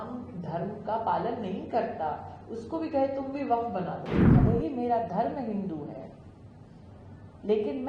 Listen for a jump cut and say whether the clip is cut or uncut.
cut